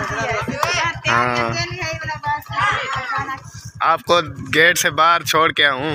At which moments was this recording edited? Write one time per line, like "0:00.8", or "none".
0:03.9